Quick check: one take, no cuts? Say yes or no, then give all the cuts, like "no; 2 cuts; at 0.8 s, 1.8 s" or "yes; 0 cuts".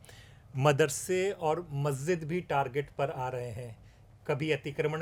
yes; 0 cuts